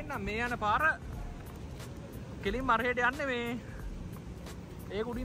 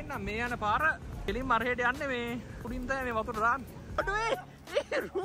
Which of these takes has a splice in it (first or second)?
second